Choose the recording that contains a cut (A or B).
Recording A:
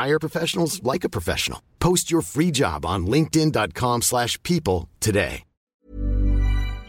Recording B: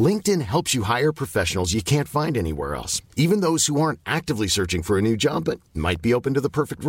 A